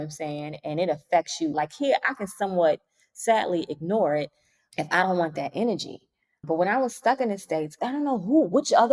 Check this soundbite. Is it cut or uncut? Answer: cut